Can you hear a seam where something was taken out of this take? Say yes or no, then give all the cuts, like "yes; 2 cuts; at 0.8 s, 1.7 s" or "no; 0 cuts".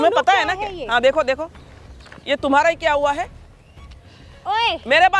no; 0 cuts